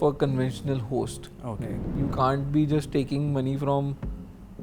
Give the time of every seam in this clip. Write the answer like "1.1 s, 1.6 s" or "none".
1.9 s